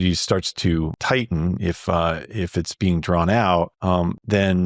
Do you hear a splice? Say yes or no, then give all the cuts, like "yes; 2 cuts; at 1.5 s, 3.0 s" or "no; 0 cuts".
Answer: yes; 2 cuts; at 1.0 s, 3.8 s